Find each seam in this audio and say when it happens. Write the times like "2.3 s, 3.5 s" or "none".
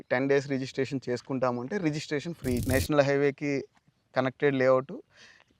2.6 s